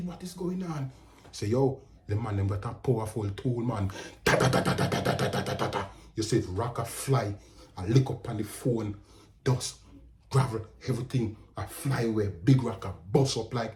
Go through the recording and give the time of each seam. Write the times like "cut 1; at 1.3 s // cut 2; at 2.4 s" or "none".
none